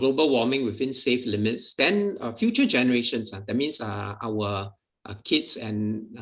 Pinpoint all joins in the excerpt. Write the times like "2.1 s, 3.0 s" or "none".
none